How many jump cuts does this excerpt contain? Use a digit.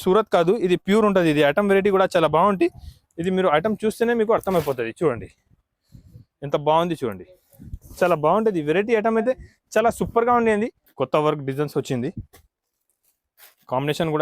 1